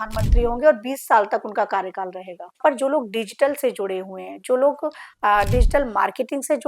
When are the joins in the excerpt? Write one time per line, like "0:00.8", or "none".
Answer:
0:02.6